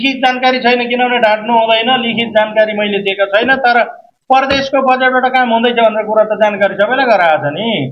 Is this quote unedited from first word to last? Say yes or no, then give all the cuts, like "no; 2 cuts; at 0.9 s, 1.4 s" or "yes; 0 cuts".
yes; 0 cuts